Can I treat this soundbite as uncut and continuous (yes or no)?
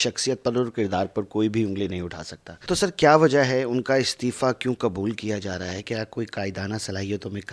yes